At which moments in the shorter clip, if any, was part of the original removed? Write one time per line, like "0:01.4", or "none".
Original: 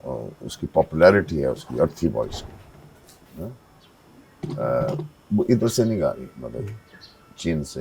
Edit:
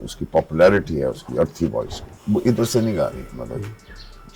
0:02.1